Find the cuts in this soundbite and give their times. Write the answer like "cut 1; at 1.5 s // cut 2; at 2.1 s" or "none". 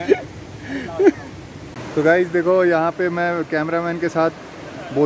none